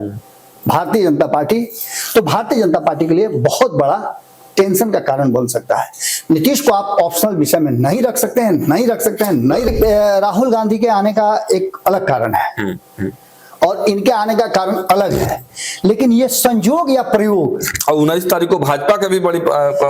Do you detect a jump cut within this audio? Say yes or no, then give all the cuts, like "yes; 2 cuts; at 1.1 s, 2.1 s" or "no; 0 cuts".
yes; 1 cut; at 9.7 s